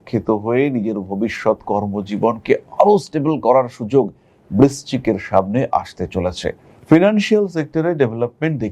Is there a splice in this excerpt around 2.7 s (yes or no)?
no